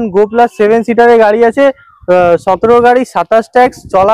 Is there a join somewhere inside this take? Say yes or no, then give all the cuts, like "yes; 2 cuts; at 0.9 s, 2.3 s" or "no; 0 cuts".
no; 0 cuts